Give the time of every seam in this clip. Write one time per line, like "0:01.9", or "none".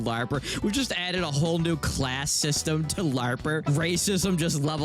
0:03.6